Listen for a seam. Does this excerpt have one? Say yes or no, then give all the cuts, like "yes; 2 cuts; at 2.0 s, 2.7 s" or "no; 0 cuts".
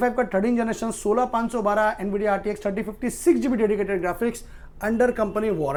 no; 0 cuts